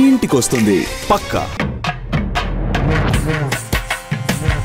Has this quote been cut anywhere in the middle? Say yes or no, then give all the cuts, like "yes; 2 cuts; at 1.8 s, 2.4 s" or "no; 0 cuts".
yes; 1 cut; at 1.5 s